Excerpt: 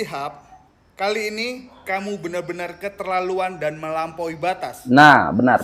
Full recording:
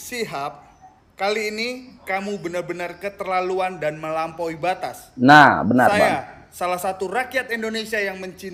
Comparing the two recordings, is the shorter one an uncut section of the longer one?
no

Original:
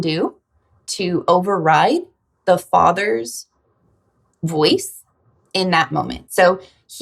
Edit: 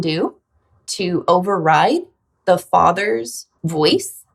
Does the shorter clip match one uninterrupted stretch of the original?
no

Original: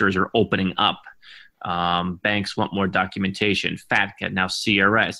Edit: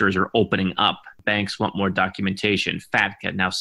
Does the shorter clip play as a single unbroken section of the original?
no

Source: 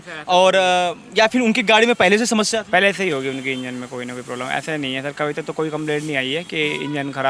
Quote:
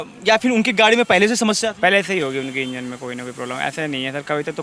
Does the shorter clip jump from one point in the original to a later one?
no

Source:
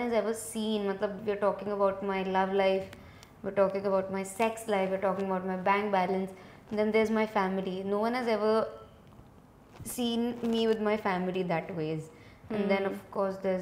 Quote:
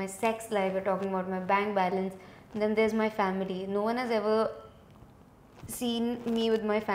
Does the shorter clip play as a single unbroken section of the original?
yes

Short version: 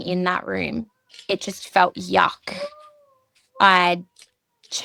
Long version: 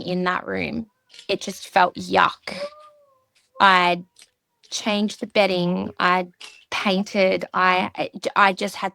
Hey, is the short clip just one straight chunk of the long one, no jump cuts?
yes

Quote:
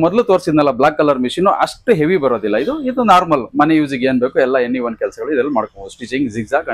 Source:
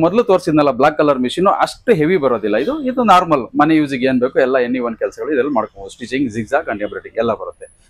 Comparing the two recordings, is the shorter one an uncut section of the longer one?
yes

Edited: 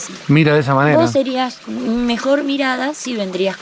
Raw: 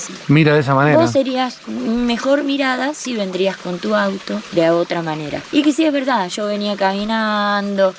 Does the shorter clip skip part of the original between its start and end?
no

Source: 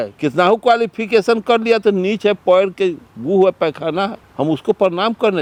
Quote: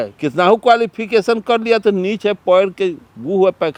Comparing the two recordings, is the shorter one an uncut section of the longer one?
yes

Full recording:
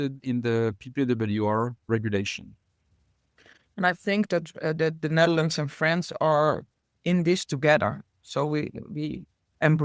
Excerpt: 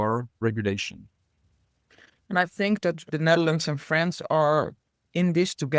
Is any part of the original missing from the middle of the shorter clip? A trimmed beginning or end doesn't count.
yes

